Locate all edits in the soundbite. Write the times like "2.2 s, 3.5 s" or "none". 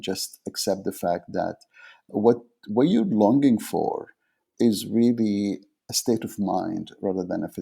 2.1 s, 4.4 s, 5.8 s